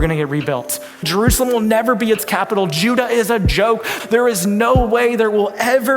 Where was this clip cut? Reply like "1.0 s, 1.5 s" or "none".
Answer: 1.1 s, 3.9 s